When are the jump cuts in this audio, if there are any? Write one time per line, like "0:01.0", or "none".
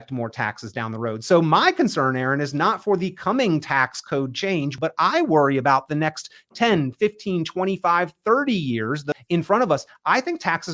0:04.7
0:09.0